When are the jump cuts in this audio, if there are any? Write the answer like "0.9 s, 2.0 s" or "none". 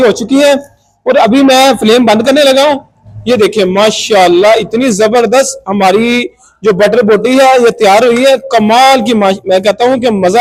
none